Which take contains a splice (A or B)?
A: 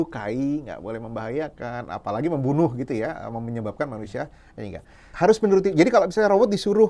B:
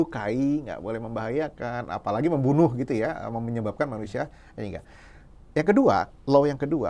A